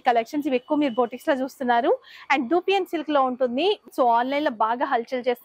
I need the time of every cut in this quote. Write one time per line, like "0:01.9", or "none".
0:03.8